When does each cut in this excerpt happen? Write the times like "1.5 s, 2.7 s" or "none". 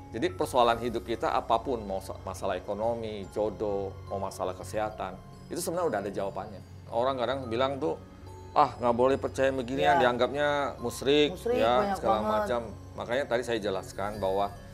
6.9 s